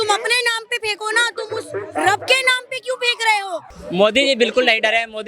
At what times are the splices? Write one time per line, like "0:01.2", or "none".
0:03.7